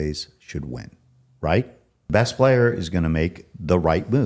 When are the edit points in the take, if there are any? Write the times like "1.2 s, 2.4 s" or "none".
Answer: 2.1 s